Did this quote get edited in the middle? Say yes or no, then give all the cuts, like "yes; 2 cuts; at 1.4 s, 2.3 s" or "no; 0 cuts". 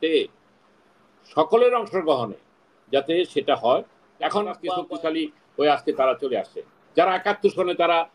yes; 1 cut; at 4.6 s